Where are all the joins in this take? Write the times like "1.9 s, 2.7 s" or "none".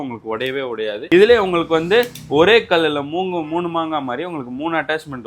1.0 s